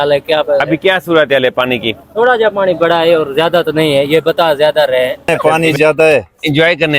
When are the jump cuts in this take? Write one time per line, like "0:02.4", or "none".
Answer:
0:05.3